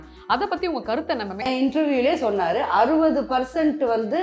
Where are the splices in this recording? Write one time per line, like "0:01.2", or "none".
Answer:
0:01.5

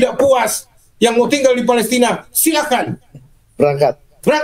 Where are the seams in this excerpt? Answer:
none

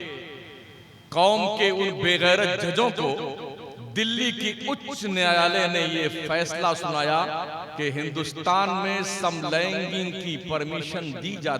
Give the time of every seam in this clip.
none

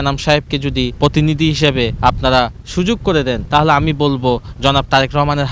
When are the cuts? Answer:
0:00.9
0:01.9
0:03.4

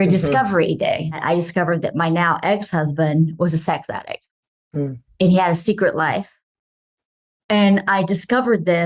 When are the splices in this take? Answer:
0:01.2

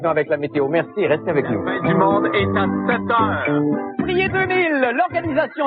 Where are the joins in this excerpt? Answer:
none

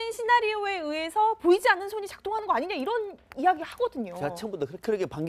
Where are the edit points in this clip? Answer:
0:01.7

